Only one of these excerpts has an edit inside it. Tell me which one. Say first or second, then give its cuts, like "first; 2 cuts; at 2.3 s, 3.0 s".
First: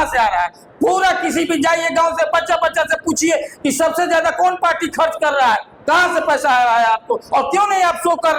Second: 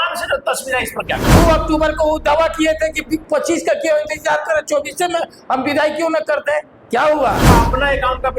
second; 2 cuts; at 1.3 s, 7.4 s